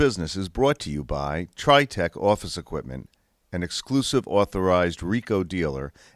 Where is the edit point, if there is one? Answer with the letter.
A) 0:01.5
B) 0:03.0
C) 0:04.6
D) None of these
A